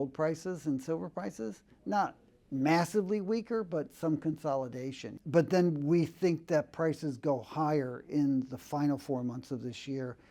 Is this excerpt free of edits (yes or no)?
no